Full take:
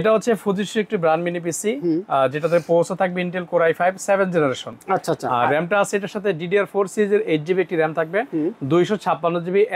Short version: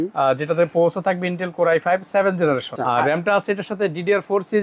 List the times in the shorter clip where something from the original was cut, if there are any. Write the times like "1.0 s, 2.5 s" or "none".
2.8 s